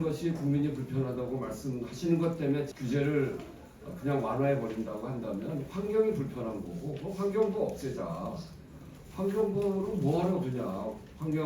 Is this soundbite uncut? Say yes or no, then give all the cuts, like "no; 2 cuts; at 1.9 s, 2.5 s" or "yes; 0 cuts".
no; 1 cut; at 2.7 s